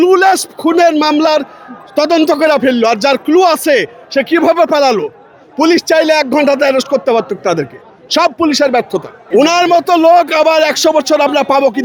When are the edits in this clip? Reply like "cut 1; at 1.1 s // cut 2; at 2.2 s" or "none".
none